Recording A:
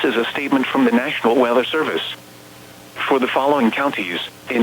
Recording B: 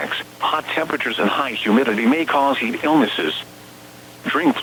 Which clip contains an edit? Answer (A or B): A